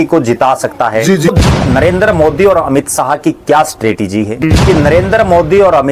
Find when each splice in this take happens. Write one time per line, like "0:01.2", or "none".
0:01.3
0:04.4